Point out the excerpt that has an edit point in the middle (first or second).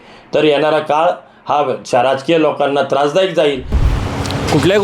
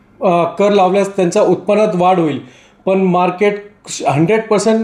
first